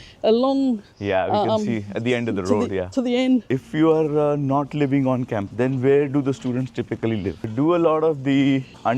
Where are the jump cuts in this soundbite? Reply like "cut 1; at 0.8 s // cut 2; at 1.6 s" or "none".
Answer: cut 1; at 3.5 s // cut 2; at 7.4 s